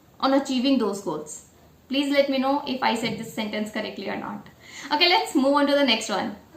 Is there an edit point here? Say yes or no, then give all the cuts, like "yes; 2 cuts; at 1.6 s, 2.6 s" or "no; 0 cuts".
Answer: no; 0 cuts